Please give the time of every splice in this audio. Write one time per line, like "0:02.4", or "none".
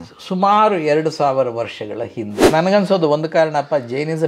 0:02.4